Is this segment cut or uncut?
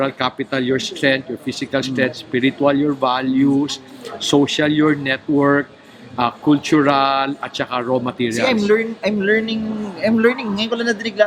uncut